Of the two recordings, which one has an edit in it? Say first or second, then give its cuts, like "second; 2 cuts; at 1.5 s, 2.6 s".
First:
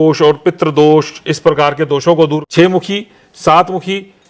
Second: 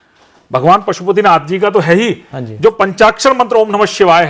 first; 1 cut; at 2.4 s